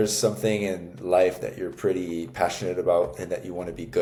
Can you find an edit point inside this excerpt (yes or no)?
no